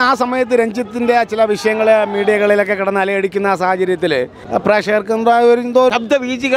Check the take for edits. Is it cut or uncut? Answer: cut